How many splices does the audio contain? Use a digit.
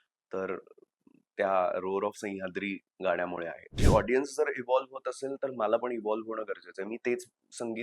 1